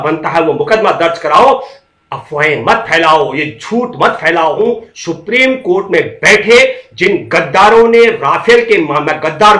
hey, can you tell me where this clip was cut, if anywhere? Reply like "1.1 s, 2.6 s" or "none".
4.6 s

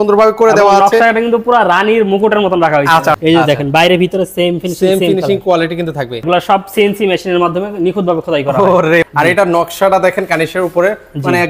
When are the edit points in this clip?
3.1 s, 6.2 s, 9.1 s

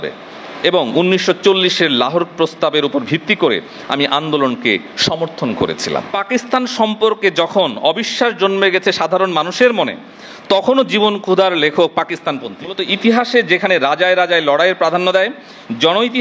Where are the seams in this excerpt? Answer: 6.1 s, 12.9 s

